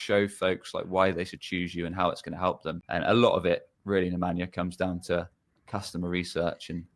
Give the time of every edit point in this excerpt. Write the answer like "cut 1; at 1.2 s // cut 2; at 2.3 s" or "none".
cut 1; at 2.7 s

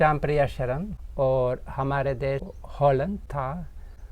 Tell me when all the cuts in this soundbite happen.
cut 1; at 0.9 s // cut 2; at 2.5 s // cut 3; at 3.3 s

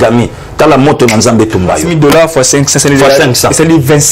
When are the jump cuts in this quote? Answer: cut 1; at 1.9 s

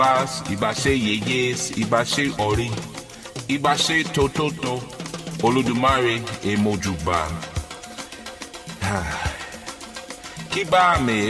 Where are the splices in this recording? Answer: none

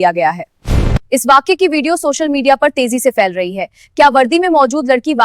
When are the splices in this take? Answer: cut 1; at 1.0 s

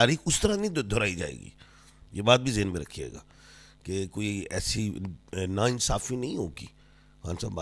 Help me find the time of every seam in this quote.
none

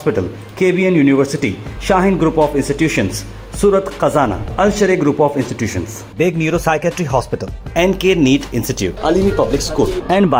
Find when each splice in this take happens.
none

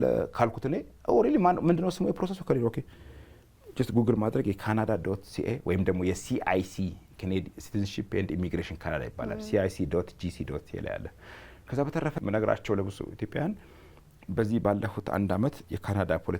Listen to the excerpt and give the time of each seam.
cut 1; at 12.1 s

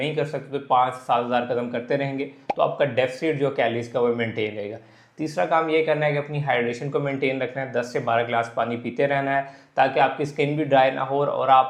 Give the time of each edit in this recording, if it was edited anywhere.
none

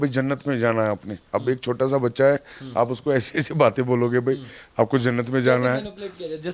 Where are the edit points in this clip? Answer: none

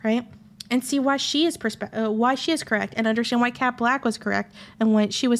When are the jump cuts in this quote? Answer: none

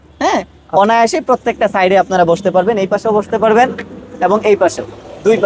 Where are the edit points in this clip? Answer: none

